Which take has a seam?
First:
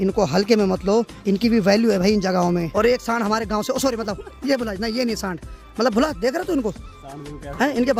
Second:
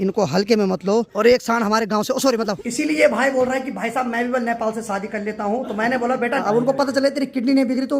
second; 3 cuts; at 1.1 s, 2.7 s, 6.4 s

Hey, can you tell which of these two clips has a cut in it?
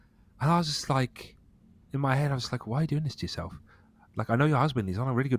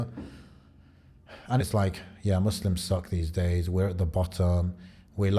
second; 1 cut; at 1.7 s

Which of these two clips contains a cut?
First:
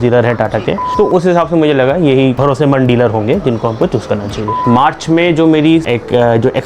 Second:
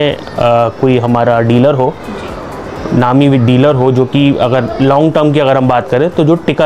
first; 4 cuts; at 0.9 s, 2.4 s, 4.6 s, 5.9 s

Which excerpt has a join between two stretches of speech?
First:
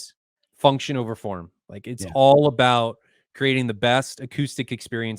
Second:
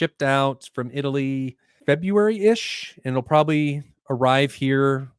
second; 1 cut; at 1.7 s

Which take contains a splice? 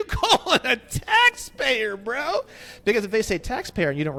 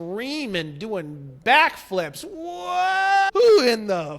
second; 1 cut; at 3.3 s

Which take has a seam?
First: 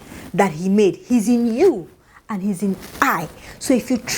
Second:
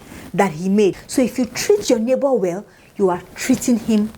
second; 1 cut; at 1.0 s

